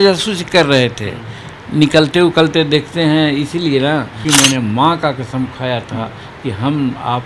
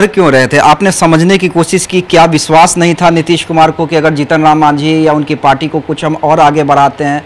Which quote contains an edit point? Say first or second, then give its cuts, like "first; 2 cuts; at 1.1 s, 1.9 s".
first; 1 cut; at 4.1 s